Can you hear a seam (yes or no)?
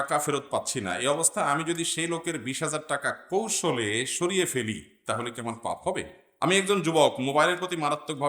yes